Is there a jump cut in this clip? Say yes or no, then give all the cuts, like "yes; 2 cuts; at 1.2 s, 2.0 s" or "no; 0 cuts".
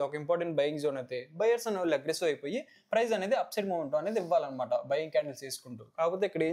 no; 0 cuts